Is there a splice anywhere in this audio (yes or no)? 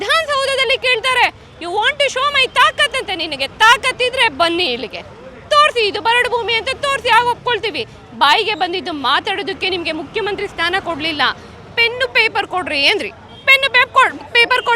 no